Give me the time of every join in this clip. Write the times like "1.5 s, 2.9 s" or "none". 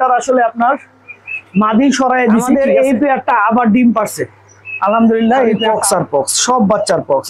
2.6 s, 5.6 s